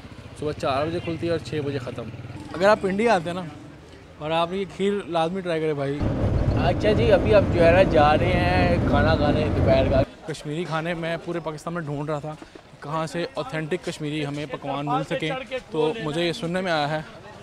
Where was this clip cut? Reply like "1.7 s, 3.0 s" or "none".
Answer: 2.2 s, 6.0 s, 10.1 s